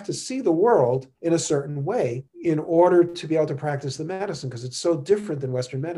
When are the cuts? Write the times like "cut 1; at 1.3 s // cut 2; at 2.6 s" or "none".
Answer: cut 1; at 1.1 s // cut 2; at 2.3 s